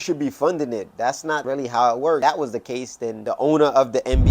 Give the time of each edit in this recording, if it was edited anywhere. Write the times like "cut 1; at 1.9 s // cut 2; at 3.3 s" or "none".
cut 1; at 2.2 s